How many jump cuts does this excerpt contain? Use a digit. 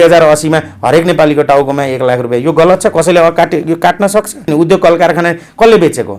1